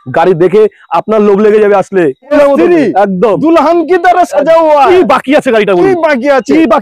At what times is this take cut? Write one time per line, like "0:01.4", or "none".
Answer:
0:02.3